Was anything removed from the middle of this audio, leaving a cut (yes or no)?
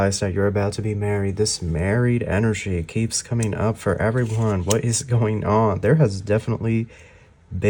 no